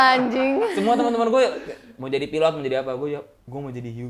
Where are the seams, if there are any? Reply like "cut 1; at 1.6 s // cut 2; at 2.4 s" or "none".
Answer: none